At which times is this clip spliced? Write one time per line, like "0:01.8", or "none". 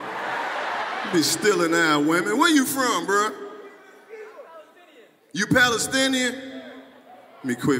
none